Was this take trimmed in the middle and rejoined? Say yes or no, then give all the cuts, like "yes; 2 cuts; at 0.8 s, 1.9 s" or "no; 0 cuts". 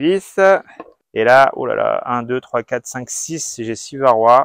yes; 1 cut; at 1.0 s